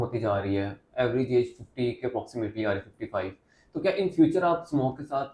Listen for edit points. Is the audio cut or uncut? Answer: uncut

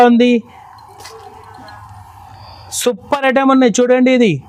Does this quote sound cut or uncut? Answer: uncut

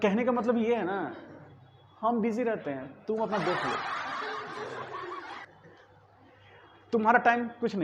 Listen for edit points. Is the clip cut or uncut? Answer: uncut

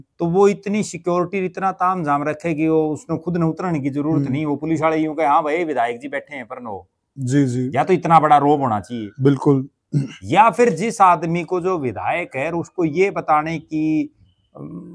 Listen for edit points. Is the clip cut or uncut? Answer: uncut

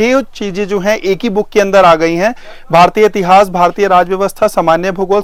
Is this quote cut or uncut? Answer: uncut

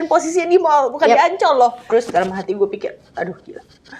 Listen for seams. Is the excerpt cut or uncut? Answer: cut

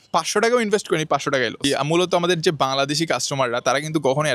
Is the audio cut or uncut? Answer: cut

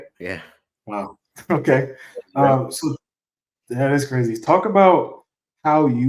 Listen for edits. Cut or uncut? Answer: uncut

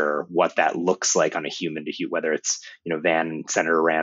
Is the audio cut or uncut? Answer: uncut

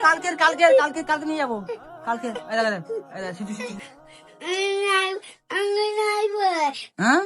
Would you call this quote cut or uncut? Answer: cut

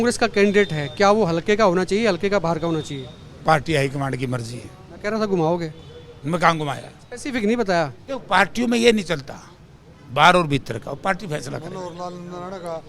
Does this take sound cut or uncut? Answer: uncut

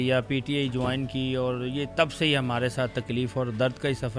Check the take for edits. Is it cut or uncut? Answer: uncut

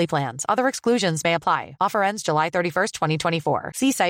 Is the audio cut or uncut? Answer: uncut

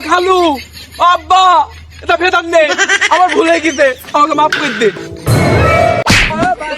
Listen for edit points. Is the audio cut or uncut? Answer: cut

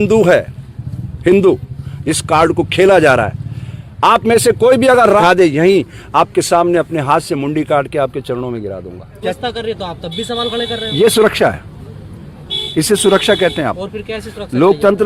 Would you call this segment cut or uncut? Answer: cut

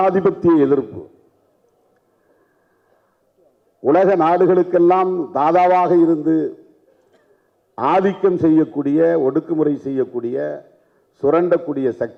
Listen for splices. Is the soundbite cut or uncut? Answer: uncut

